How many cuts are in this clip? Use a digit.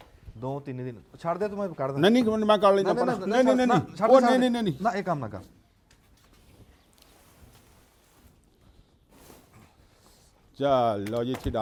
0